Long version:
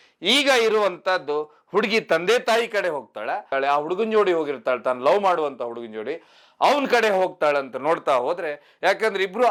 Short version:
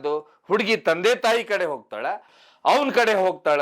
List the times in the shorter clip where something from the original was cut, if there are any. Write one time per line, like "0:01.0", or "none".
0:02.2